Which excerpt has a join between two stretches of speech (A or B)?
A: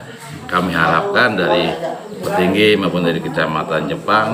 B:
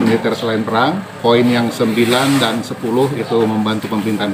B